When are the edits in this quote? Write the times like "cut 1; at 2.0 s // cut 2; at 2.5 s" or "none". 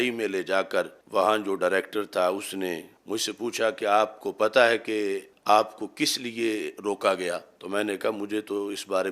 cut 1; at 1.0 s // cut 2; at 2.9 s // cut 3; at 5.3 s // cut 4; at 7.5 s